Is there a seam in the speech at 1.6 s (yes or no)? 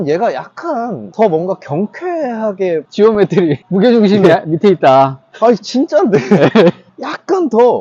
no